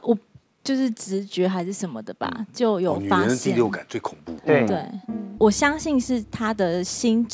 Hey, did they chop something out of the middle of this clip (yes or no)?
yes